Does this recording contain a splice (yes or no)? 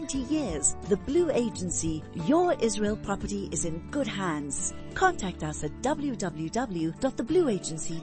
no